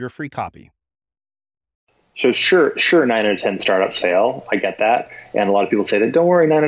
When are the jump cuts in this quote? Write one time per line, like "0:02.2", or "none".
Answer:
0:02.0